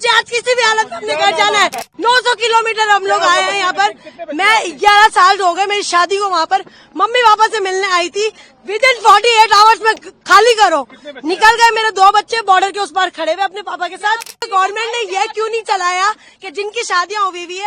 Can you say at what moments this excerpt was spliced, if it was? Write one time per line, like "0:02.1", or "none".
0:01.9
0:14.5